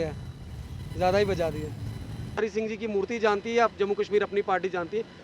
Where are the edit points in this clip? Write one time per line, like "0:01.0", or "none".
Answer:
0:02.4